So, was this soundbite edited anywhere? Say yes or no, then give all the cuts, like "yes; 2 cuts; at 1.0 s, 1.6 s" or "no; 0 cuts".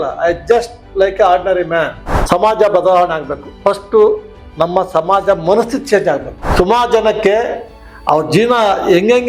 yes; 2 cuts; at 2.1 s, 6.4 s